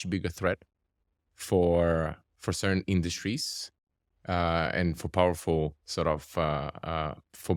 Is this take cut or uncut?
uncut